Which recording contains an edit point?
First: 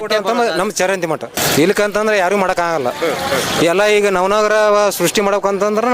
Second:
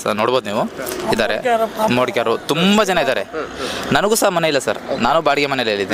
first; 1 cut; at 1.4 s

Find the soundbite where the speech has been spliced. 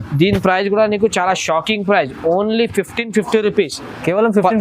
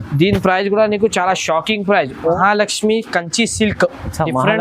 second; 1 cut; at 2.4 s

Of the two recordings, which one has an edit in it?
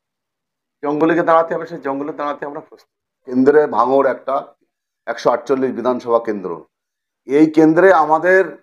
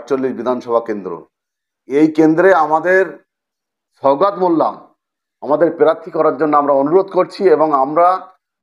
first; 1 cut; at 3.3 s

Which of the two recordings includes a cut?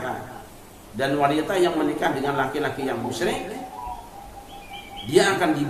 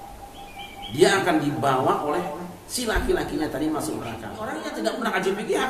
second; 1 cut; at 4.5 s

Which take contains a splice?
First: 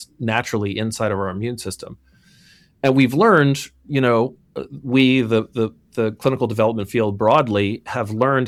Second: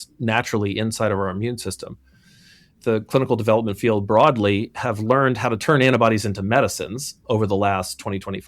second; 1 cut; at 2.7 s

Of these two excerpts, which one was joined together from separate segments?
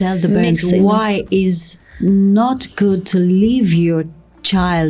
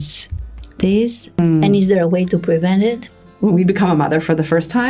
second; 2 cuts; at 1.4 s, 3.2 s

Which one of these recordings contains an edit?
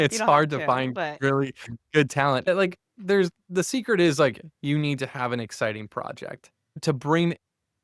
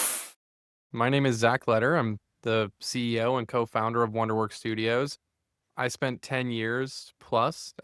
first; 2 cuts; at 2.5 s, 6.8 s

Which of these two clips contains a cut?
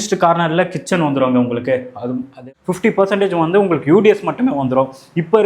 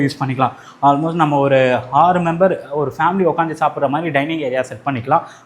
first; 1 cut; at 2.5 s

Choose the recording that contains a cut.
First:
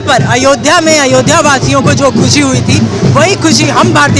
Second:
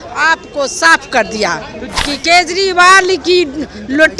second; 1 cut; at 1.8 s

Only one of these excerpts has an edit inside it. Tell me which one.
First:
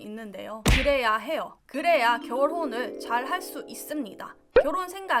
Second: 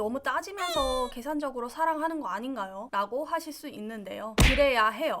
second; 1 cut; at 2.8 s

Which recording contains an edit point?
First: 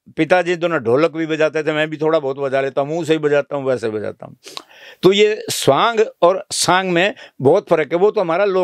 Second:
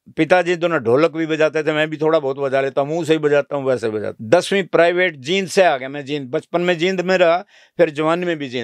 second; 1 cut; at 4.1 s

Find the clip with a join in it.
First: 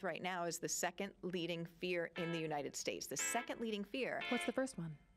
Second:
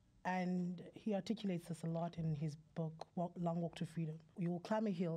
second; 1 cut; at 4.2 s

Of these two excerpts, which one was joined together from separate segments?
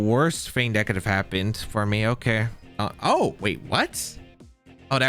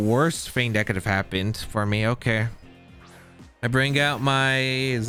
first; 1 cut; at 2.7 s

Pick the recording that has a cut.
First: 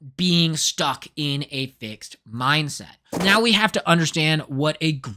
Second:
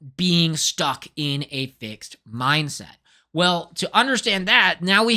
first; 1 cut; at 3.1 s

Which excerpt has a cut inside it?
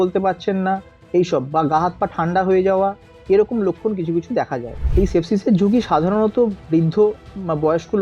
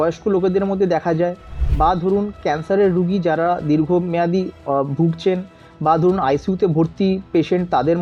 first; 1 cut; at 4.8 s

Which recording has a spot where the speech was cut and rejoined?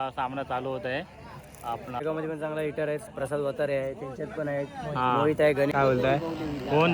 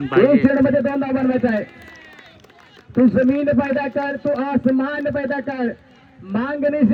first; 2 cuts; at 2.0 s, 5.7 s

